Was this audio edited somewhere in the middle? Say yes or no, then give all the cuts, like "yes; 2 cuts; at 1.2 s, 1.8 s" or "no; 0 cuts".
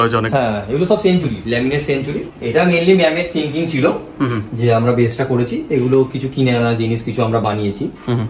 yes; 1 cut; at 2.3 s